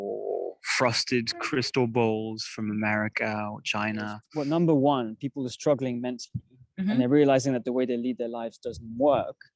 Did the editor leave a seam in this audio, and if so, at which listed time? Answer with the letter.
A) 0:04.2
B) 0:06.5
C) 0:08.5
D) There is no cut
A